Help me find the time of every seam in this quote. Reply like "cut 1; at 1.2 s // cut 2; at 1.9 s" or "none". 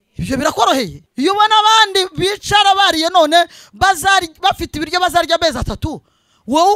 cut 1; at 1.0 s

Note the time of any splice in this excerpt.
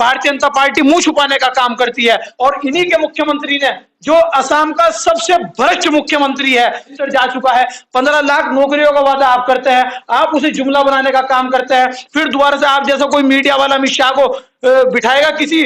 cut 1; at 2.3 s // cut 2; at 7.0 s

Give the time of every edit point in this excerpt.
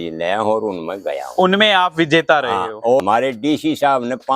cut 1; at 3.0 s

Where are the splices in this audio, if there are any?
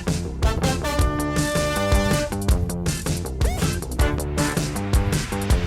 cut 1; at 4.7 s

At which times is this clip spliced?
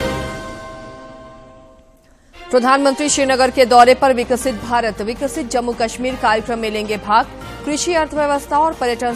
cut 1; at 0.9 s

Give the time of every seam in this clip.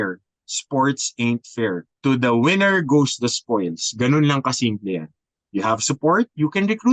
cut 1; at 1.9 s

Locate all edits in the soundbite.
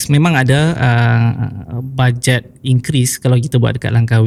none

